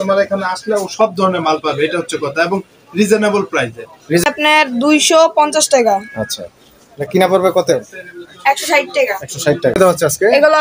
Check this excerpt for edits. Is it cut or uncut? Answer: cut